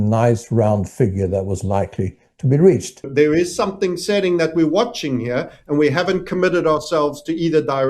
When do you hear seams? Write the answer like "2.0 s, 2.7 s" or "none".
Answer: 3.1 s

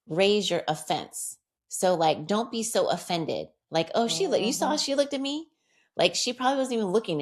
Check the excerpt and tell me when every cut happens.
none

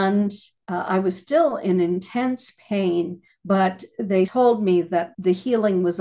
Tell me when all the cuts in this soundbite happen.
4.3 s, 5.1 s

